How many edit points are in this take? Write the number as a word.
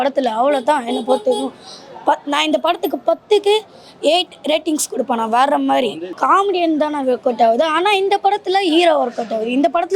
one